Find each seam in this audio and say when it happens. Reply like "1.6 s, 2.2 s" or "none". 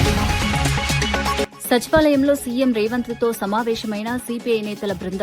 1.4 s